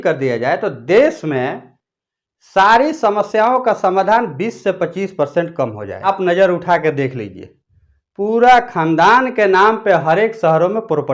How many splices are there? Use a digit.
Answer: 1